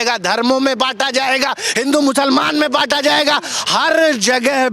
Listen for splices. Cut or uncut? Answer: uncut